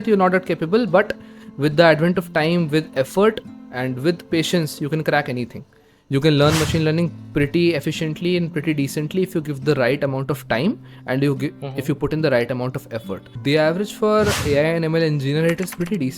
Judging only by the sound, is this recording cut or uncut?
cut